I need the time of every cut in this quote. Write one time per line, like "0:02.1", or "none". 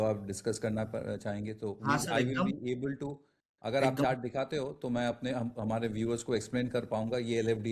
none